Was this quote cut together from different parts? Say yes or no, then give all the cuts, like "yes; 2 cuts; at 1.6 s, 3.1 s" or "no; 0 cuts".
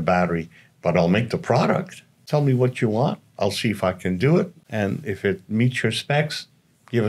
yes; 2 cuts; at 2.2 s, 4.6 s